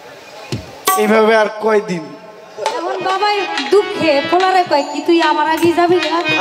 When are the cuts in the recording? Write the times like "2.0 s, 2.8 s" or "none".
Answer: 3.0 s